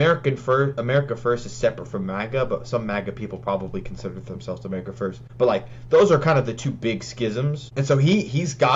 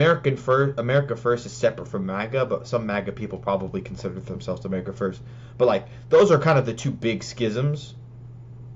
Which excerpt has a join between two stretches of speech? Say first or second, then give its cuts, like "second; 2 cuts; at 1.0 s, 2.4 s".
first; 2 cuts; at 5.2 s, 7.6 s